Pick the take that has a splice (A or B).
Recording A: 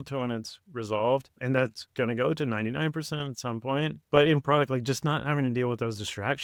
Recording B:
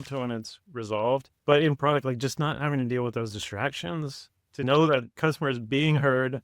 B